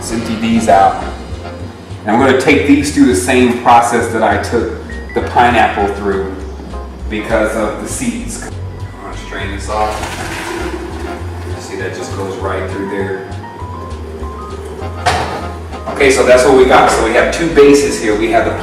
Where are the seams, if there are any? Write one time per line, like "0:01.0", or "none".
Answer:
0:03.4